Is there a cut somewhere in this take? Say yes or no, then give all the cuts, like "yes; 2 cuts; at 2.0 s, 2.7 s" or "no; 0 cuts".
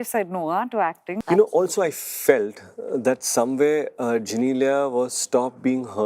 yes; 1 cut; at 1.1 s